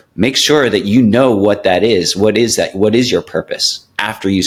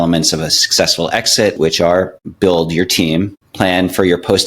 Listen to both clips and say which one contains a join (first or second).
second